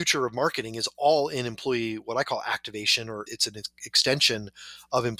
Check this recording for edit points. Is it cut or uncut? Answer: uncut